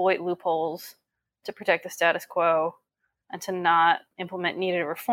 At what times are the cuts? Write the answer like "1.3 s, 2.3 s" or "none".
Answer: 4.1 s